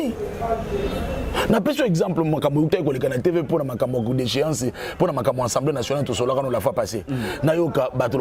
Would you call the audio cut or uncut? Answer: uncut